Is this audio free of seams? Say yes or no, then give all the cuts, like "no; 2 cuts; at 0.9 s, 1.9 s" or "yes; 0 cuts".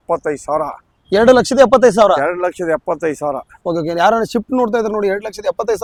yes; 0 cuts